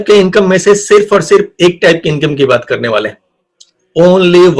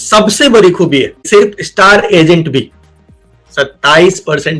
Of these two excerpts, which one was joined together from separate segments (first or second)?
second